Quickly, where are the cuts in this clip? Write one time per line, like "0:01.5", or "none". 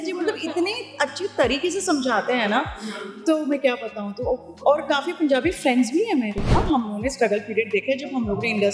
0:06.5